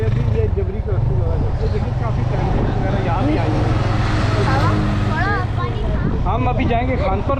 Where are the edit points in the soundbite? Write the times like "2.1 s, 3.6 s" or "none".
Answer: 5.6 s